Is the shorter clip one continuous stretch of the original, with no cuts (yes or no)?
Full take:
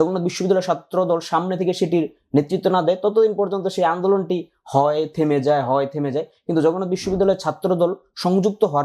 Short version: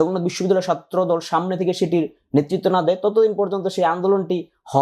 yes